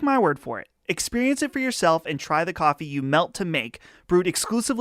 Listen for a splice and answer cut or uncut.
uncut